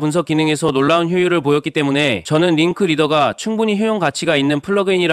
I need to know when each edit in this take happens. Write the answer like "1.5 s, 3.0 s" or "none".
2.2 s

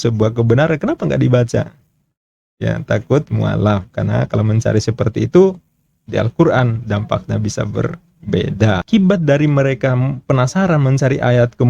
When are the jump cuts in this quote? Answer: 8.9 s

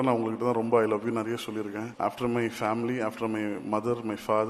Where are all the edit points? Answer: 1.8 s

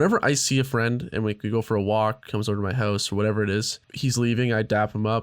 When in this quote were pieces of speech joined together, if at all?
3.8 s

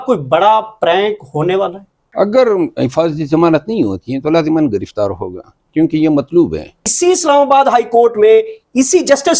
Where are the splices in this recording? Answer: 2.0 s, 6.8 s

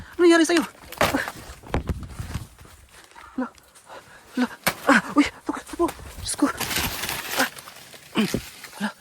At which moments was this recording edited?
7.6 s

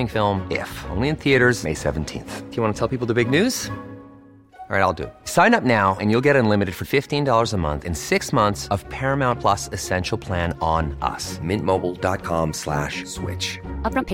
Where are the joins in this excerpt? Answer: none

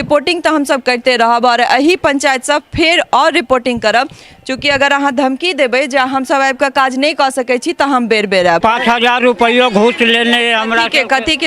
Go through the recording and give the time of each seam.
8.6 s

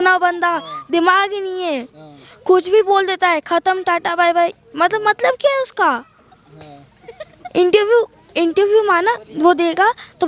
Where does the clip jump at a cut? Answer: none

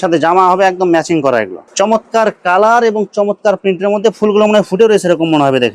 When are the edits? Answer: 1.6 s

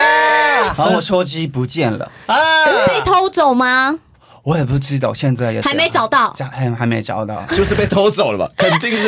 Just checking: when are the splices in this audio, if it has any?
none

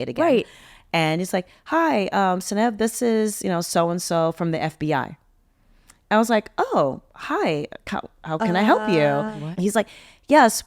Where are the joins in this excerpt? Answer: 9.4 s

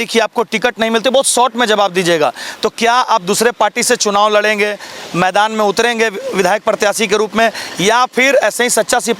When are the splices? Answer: none

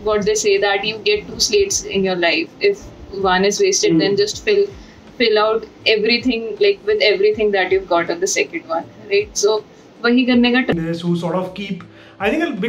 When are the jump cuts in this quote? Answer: 10.7 s

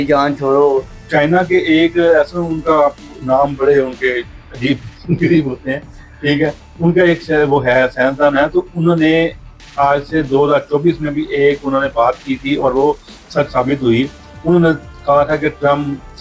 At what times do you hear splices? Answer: 1.1 s

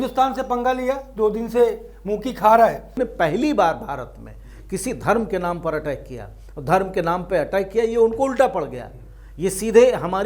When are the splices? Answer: 3.0 s

